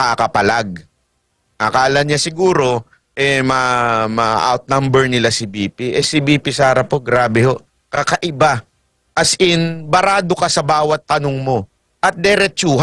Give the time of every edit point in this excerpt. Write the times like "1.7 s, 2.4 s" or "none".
none